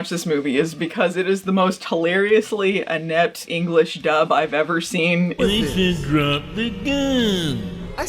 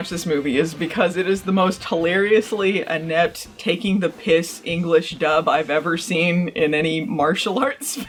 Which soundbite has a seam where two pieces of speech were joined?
first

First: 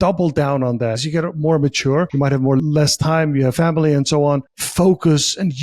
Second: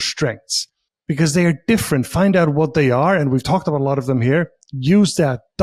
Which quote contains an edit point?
first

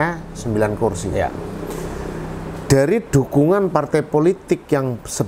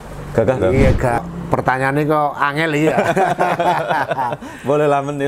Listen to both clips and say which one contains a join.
second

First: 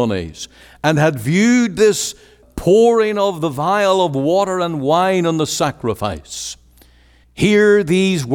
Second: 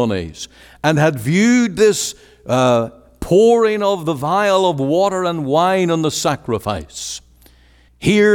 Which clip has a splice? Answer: first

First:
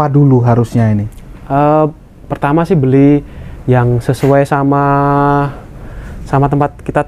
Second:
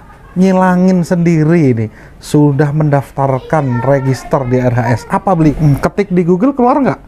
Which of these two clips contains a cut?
second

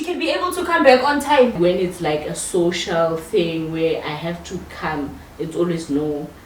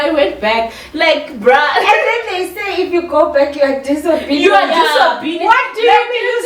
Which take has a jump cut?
first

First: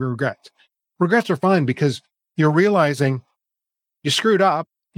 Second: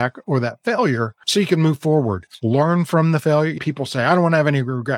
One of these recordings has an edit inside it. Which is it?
second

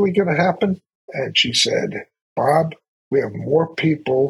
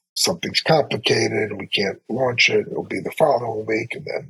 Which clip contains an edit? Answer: first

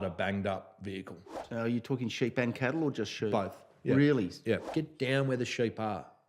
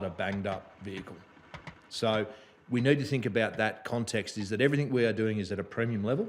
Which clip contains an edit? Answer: first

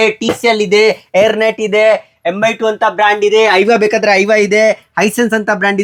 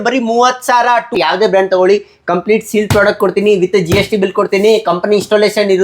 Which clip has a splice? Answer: second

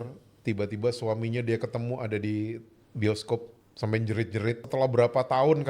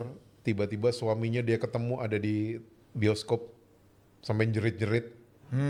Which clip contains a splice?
first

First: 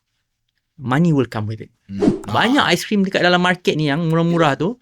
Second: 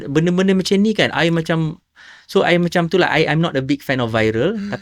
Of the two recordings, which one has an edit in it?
first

